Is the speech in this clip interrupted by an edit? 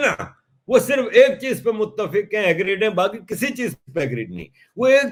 no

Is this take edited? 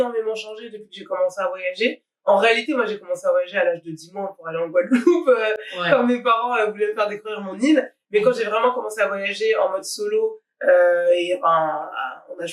no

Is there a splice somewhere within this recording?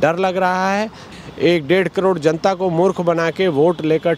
yes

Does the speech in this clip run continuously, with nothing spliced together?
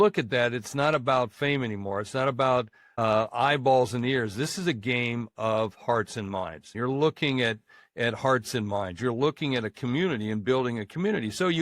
no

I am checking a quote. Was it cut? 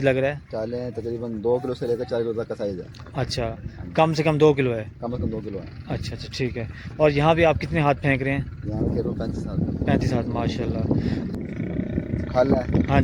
yes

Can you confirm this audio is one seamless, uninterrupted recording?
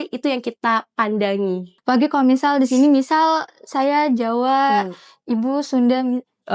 no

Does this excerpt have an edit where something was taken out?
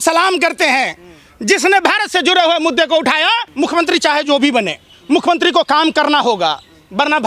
yes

